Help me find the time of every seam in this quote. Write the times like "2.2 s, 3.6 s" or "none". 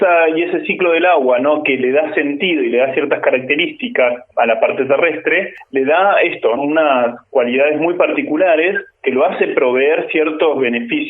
4.3 s, 5.6 s, 6.6 s, 8.9 s